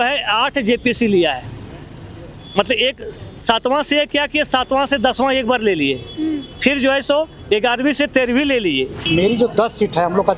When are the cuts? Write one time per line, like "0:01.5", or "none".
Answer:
0:09.0